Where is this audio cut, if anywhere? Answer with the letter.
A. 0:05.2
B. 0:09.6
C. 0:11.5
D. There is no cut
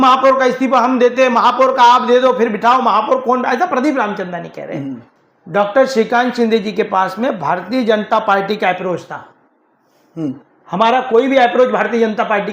A